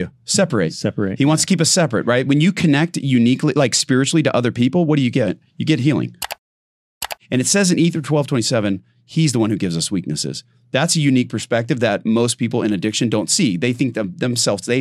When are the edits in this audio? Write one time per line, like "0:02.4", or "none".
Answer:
0:06.8